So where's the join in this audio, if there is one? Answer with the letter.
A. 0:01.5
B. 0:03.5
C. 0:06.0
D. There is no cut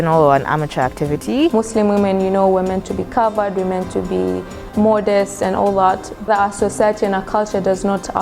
A